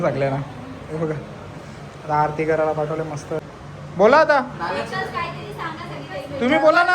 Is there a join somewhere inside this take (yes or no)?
yes